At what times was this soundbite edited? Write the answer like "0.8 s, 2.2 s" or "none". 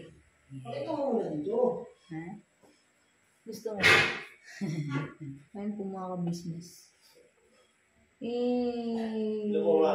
5.4 s